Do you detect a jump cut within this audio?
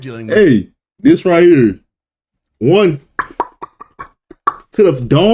no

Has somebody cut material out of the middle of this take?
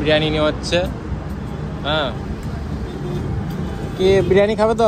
no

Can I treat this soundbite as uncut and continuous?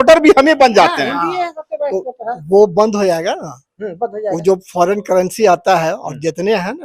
yes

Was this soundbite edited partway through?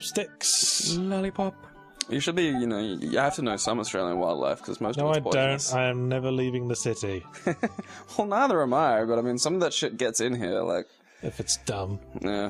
no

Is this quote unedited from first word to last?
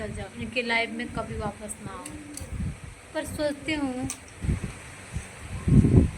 no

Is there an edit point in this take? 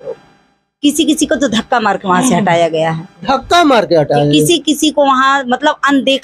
no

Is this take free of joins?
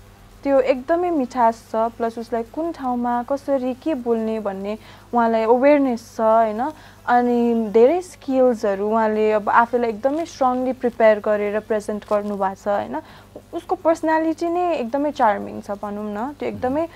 yes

